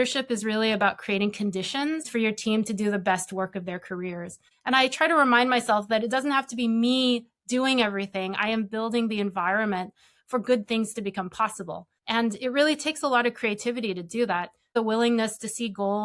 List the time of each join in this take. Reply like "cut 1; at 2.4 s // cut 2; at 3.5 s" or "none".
cut 1; at 2.1 s // cut 2; at 4.4 s // cut 3; at 11.9 s // cut 4; at 14.7 s